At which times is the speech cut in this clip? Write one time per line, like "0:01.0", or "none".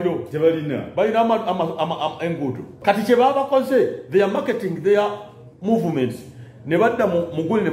0:02.8

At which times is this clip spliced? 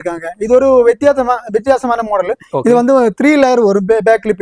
none

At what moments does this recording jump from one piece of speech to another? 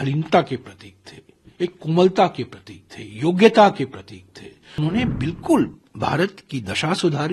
0:04.8

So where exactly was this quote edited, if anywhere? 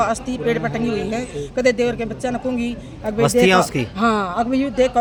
none

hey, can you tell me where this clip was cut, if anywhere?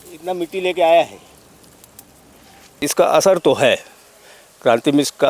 0:02.8

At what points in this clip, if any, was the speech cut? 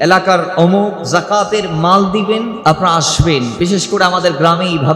0:01.0
0:02.5
0:03.5

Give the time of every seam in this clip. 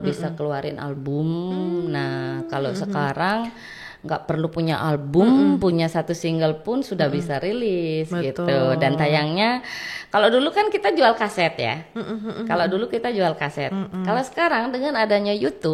none

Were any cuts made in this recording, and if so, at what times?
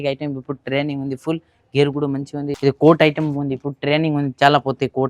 0:02.5

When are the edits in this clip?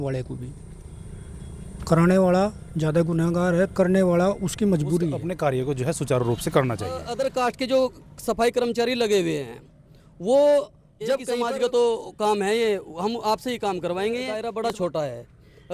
0:05.2
0:07.0
0:11.3
0:14.4

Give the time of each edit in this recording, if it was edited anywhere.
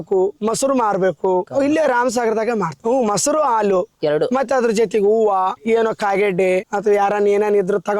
0:01.5

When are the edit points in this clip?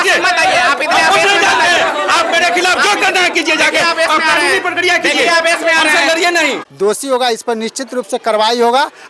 0:06.6

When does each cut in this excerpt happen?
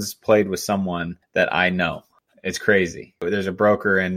0:01.2
0:03.2

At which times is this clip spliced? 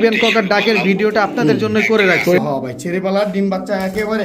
0:02.4

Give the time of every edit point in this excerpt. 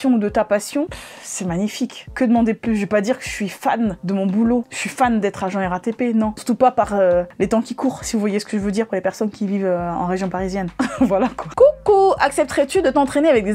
none

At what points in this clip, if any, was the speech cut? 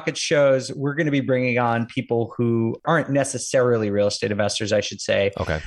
0:02.8

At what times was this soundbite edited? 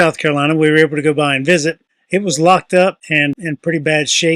0:01.9
0:03.3

